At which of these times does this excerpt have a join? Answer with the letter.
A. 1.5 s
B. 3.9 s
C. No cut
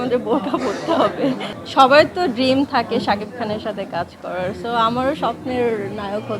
A